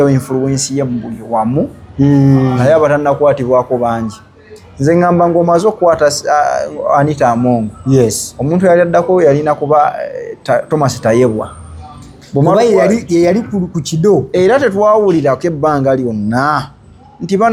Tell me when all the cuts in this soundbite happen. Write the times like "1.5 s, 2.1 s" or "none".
none